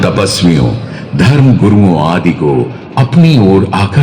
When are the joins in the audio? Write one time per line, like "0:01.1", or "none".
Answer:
none